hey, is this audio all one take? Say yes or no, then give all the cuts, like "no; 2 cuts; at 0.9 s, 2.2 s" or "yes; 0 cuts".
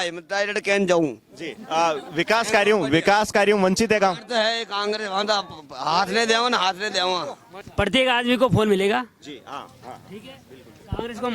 no; 1 cut; at 7.5 s